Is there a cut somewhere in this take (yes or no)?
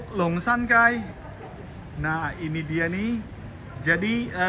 no